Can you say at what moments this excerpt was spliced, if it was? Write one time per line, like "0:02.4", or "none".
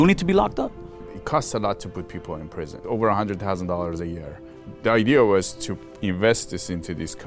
0:01.1
0:02.8
0:04.6